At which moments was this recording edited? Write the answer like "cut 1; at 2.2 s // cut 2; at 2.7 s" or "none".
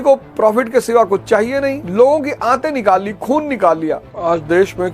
cut 1; at 1.8 s // cut 2; at 4.1 s